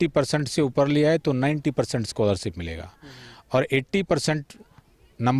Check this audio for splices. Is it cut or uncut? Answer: uncut